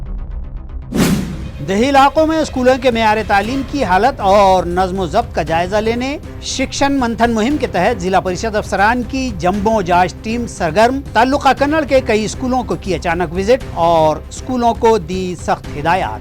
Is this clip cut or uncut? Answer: cut